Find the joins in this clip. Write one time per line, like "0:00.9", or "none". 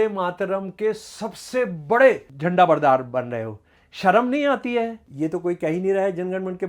0:02.3
0:05.0